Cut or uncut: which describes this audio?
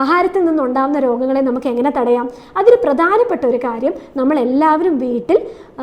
uncut